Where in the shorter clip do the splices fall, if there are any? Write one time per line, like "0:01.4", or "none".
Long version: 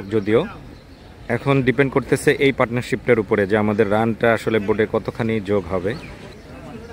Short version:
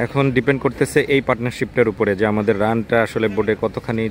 none

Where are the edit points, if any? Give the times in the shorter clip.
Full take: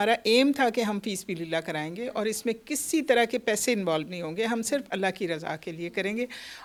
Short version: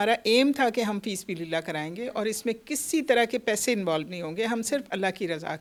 none

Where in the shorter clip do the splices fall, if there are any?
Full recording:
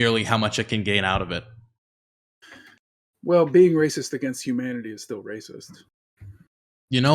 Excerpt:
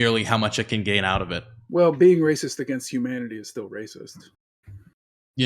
0:01.5

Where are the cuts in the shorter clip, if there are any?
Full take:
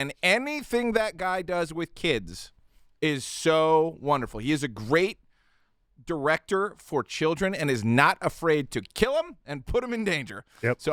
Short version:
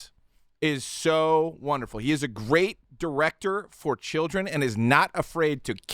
0:02.8

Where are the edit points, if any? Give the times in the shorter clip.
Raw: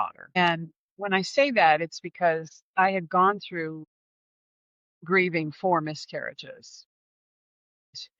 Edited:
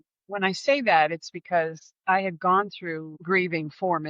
0:03.1

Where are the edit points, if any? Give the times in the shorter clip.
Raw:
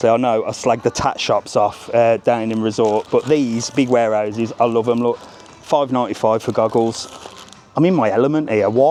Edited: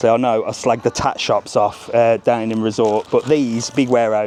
none

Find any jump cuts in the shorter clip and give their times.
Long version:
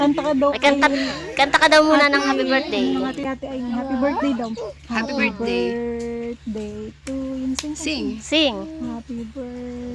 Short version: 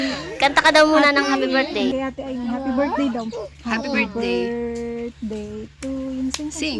0:01.9

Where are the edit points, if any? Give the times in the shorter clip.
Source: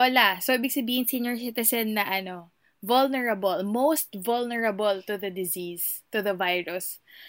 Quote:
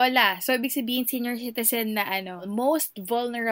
0:02.5

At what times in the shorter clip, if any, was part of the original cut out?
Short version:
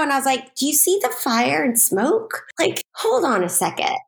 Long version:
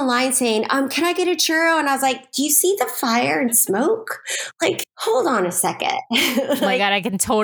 0:02.4

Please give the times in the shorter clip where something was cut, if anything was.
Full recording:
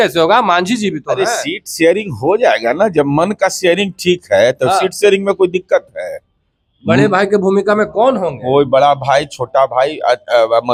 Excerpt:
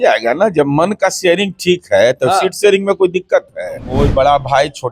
0:03.8

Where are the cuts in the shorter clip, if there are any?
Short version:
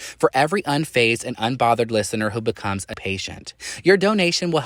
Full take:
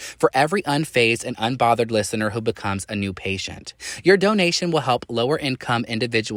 0:02.9

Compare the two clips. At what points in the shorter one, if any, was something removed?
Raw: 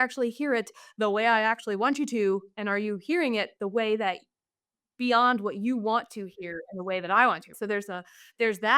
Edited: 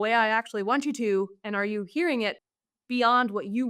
0:02.4

